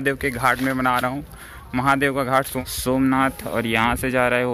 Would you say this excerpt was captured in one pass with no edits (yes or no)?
no